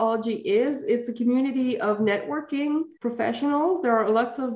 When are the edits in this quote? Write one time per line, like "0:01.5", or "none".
0:02.9